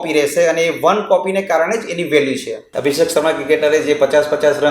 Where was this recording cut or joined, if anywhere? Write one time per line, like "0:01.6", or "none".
0:02.7